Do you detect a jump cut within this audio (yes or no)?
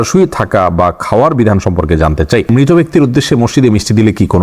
yes